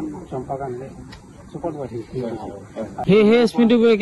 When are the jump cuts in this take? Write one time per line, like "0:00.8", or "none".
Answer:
0:03.0